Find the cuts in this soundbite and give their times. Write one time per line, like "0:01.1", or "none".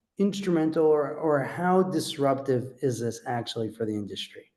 none